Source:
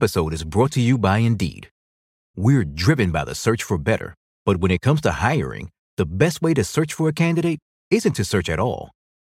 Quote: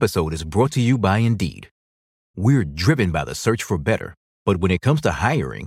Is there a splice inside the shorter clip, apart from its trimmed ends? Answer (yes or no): no